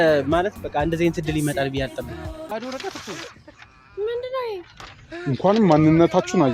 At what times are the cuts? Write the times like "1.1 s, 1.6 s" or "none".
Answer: 2.5 s